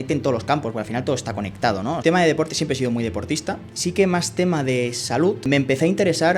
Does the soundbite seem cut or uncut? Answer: cut